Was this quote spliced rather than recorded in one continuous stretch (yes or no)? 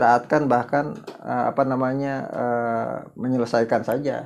no